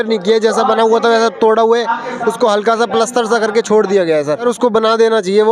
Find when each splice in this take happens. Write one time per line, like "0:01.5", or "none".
0:04.4